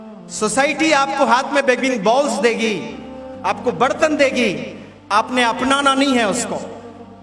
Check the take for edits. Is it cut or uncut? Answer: uncut